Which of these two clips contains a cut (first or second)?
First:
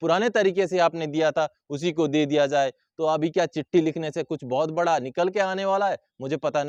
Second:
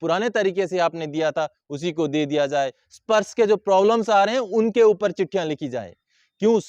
second